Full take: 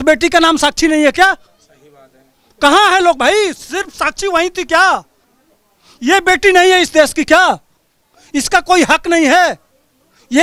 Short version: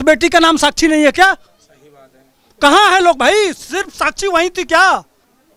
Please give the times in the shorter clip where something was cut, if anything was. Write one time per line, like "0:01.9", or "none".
none